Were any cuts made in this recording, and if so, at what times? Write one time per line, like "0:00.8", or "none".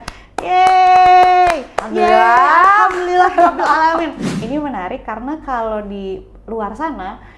0:04.3